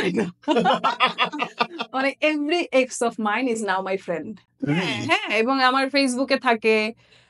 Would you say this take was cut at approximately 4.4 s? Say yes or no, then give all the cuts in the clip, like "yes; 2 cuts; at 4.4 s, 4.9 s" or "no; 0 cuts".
no; 0 cuts